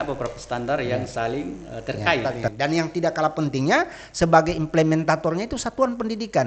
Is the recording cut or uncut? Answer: cut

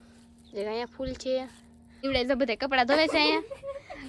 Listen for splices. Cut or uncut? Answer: cut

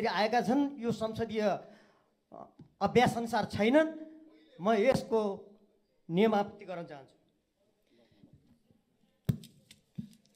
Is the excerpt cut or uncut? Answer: uncut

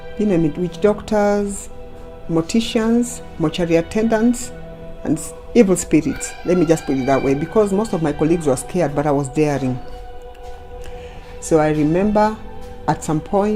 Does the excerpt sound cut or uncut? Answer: uncut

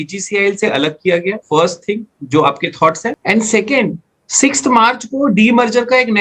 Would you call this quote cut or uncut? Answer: cut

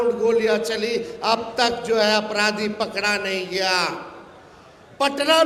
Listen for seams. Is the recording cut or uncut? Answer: uncut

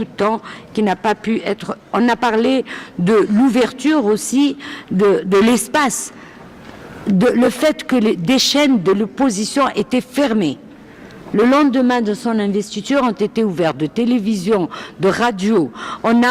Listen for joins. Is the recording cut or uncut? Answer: uncut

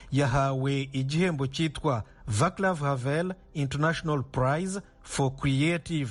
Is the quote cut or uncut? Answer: uncut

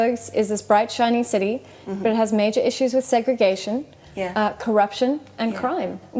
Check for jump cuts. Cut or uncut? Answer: uncut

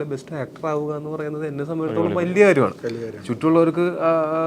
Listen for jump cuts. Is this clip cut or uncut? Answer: uncut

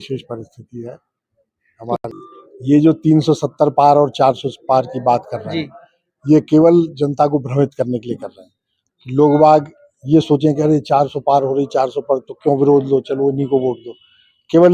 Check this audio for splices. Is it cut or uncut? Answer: cut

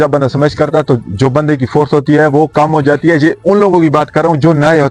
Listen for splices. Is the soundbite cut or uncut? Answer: uncut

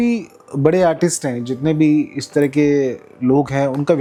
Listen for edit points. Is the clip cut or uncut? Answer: uncut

